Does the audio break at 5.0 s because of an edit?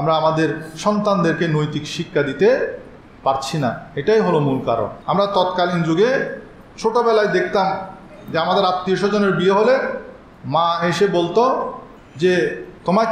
yes; 1 cut; at 5.0 s

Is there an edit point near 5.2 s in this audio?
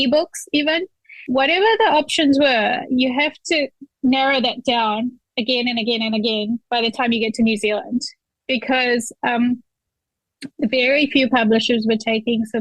no; 2 cuts; at 0.9 s, 3.8 s

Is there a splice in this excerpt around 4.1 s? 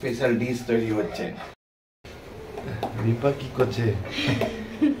no; 1 cut; at 1.5 s

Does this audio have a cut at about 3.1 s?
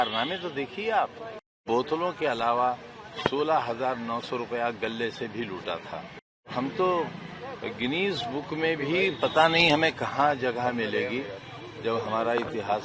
no; 2 cuts; at 1.6 s, 6.5 s

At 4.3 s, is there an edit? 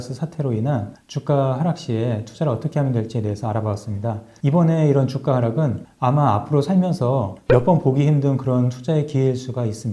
yes; 1 cut; at 4.3 s

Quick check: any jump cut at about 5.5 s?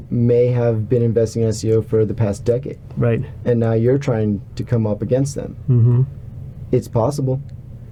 no; 0 cuts

